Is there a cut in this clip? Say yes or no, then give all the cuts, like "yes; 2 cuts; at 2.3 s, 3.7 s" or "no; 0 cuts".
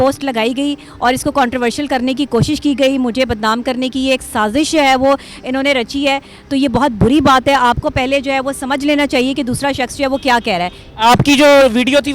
no; 0 cuts